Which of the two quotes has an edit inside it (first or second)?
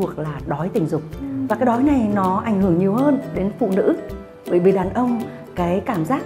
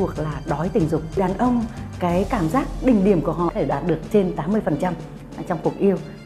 second